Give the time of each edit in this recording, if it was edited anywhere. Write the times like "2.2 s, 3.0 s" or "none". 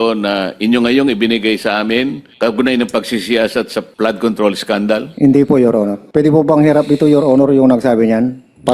2.2 s, 3.8 s, 5.1 s, 6.0 s